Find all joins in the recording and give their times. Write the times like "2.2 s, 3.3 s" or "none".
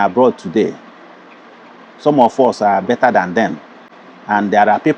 none